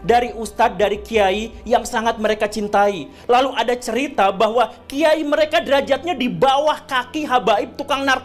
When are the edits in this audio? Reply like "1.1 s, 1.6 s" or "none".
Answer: none